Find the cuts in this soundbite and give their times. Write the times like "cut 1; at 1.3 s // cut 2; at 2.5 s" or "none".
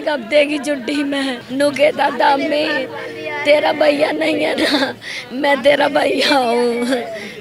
cut 1; at 1.4 s